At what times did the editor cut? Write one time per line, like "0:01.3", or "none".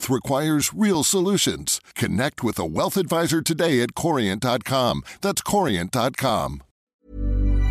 0:06.7